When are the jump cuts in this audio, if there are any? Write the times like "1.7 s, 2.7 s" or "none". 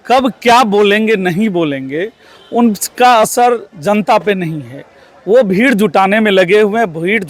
none